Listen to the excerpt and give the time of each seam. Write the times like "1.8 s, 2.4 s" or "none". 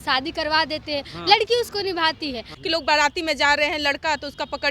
2.5 s

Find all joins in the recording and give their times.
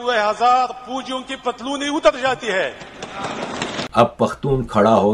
3.8 s

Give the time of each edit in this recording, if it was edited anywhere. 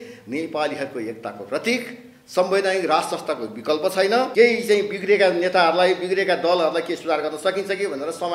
4.3 s

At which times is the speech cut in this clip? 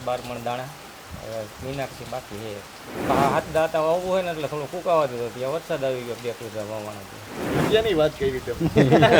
3.1 s, 7.5 s

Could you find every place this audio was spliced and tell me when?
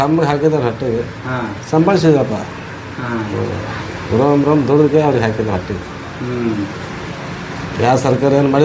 none

